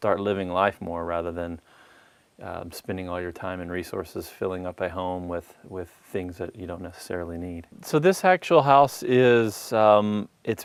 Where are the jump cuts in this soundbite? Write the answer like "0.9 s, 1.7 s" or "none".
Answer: none